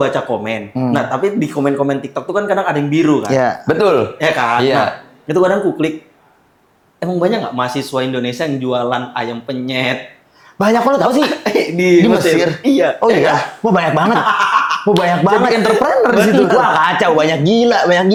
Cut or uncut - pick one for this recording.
uncut